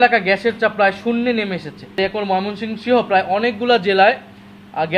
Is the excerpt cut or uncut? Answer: cut